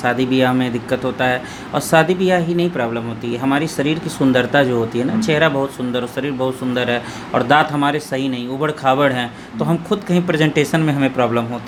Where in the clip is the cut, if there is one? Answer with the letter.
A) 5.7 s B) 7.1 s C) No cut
C